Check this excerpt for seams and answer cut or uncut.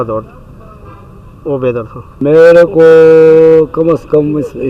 cut